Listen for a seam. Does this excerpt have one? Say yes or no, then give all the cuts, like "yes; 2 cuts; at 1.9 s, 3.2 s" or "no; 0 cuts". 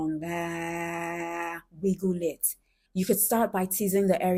no; 0 cuts